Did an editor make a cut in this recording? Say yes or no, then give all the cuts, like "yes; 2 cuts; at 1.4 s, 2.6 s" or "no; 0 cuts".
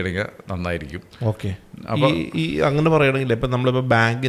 no; 0 cuts